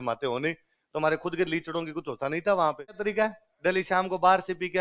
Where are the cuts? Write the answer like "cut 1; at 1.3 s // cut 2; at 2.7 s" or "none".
cut 1; at 3.0 s

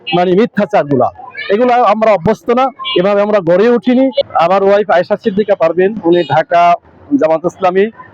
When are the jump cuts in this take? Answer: cut 1; at 4.2 s

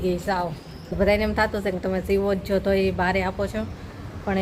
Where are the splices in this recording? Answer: cut 1; at 0.9 s

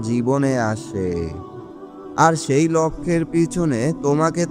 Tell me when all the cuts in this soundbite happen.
cut 1; at 1.7 s

